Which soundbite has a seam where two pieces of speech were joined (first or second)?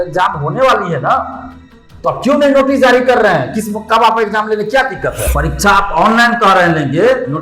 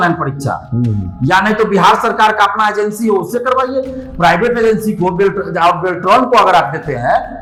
first